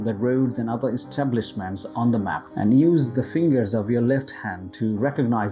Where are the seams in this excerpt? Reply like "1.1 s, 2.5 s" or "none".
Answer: none